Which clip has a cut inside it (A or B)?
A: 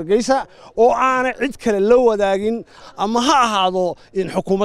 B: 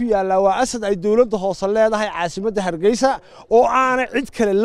A